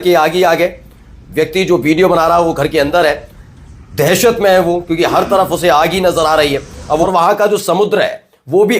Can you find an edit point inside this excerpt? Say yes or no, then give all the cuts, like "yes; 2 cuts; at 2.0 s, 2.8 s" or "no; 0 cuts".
yes; 1 cut; at 7.1 s